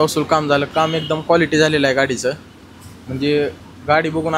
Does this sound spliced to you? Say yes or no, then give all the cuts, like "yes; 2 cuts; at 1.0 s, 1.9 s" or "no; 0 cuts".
no; 0 cuts